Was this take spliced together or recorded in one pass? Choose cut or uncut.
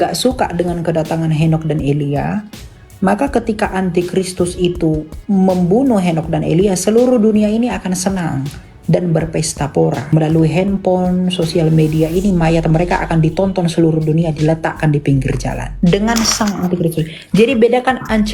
cut